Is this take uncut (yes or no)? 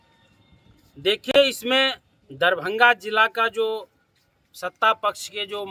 yes